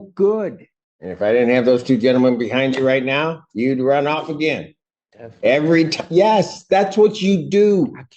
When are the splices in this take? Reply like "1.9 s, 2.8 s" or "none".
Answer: 1.2 s